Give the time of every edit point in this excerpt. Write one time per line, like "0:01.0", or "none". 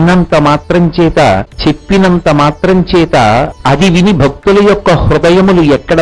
0:01.5
0:03.5